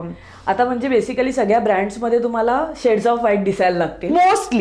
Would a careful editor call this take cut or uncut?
uncut